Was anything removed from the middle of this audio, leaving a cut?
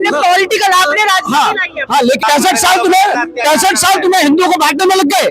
yes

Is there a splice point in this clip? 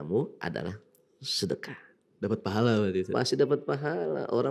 no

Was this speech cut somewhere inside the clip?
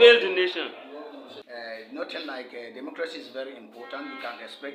yes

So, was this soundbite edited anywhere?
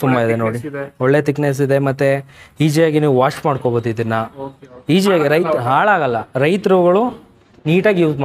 no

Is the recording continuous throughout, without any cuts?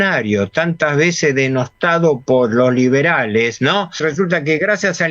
no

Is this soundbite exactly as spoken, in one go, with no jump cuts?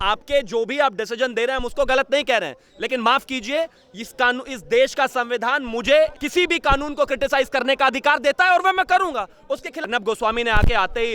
no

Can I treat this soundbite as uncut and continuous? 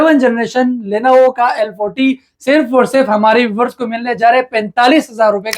yes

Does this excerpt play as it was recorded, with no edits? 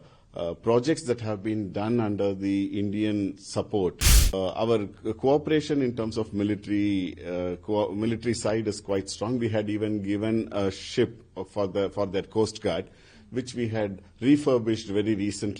no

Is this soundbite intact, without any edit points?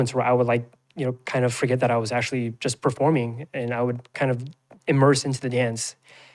yes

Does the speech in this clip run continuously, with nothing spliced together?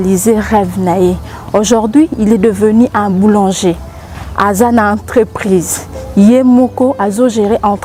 yes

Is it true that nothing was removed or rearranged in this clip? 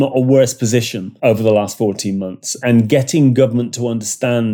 no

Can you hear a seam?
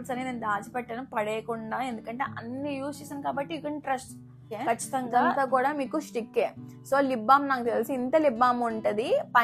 yes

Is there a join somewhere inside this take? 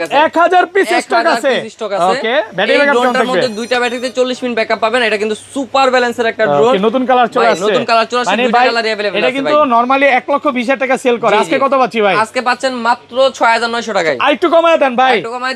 no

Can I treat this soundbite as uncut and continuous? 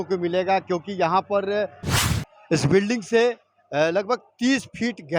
no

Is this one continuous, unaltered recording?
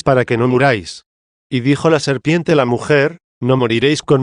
no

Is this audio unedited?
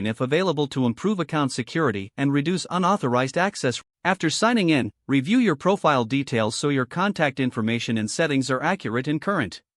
no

